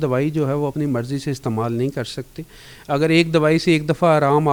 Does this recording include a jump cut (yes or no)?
no